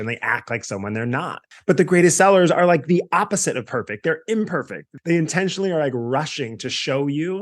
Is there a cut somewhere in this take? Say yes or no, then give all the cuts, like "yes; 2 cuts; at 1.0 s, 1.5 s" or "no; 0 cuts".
yes; 2 cuts; at 1.5 s, 4.8 s